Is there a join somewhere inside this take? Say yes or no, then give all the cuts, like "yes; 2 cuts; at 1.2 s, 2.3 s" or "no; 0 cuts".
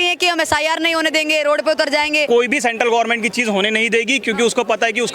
yes; 1 cut; at 2.3 s